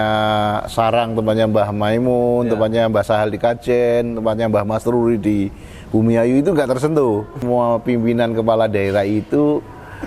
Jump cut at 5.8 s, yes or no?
no